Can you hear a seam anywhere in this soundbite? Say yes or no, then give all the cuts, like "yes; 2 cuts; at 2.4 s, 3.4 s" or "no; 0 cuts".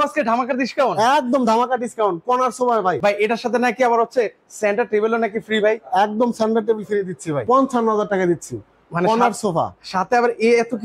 yes; 2 cuts; at 3.0 s, 7.4 s